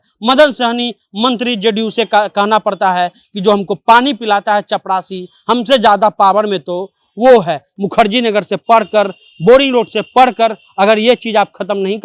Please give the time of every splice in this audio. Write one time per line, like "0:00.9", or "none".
0:07.7